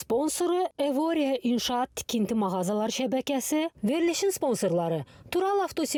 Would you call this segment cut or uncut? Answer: uncut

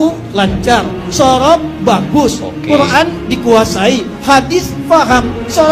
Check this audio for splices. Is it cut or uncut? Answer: uncut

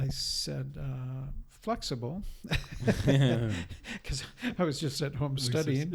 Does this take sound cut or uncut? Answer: uncut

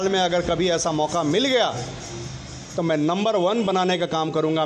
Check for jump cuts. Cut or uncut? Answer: uncut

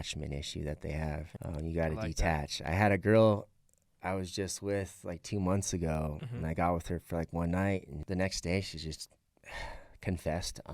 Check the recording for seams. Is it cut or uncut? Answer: cut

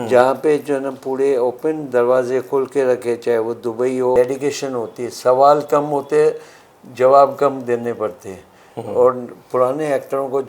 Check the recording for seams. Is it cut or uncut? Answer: cut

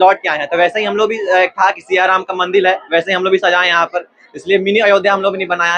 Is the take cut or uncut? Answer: uncut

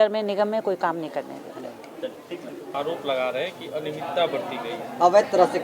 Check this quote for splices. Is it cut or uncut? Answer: cut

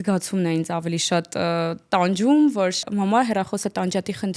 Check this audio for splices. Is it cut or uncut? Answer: cut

